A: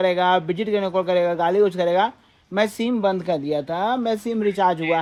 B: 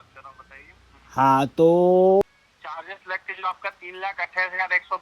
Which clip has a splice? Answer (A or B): B